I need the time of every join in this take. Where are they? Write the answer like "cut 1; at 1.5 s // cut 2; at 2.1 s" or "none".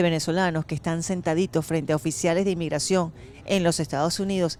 none